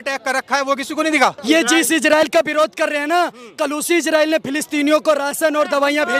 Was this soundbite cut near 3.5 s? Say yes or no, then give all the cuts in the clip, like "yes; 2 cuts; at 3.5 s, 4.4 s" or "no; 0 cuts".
no; 1 cut; at 1.4 s